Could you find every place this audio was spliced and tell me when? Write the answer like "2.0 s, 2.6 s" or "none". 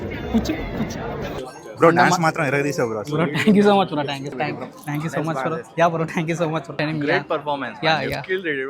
1.4 s, 4.4 s, 6.8 s